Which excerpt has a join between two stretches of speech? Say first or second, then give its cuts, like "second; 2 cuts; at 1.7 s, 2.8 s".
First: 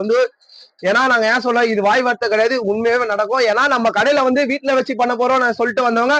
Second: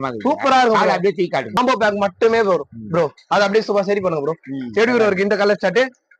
second; 1 cut; at 1.6 s